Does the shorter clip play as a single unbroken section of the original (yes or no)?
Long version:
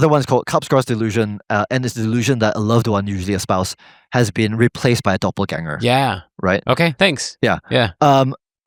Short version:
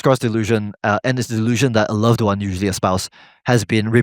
yes